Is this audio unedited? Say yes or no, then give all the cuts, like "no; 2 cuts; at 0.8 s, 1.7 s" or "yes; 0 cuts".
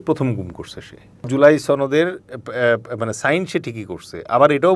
no; 1 cut; at 1.2 s